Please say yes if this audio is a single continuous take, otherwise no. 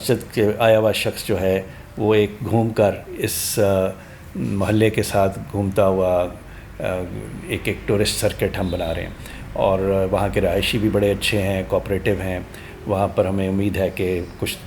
yes